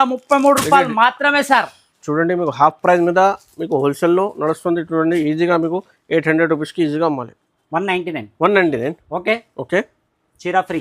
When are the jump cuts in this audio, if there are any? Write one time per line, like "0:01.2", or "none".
0:07.5